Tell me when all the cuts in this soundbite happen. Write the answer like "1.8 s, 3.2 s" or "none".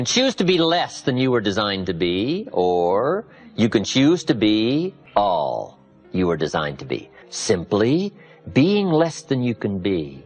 5.0 s, 7.2 s